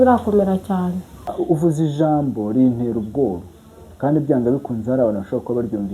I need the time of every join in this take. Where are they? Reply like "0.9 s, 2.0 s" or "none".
1.3 s